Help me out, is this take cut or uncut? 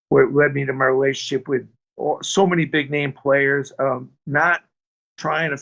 uncut